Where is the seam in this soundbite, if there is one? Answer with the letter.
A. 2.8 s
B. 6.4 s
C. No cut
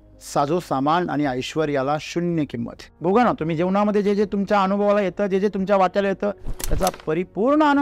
A